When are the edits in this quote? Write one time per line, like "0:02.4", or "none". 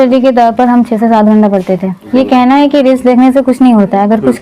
0:02.0